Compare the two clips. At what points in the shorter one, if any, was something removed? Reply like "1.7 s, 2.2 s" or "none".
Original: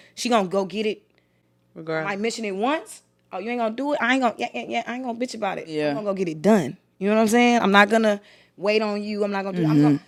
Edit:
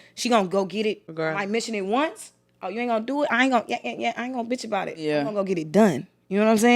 1.1 s